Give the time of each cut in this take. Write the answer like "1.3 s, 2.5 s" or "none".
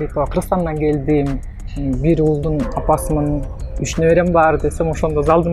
none